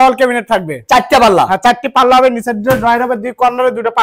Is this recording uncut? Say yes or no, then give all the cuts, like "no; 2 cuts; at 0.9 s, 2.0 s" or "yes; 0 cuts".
yes; 0 cuts